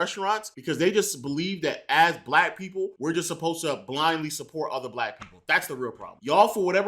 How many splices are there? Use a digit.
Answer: 1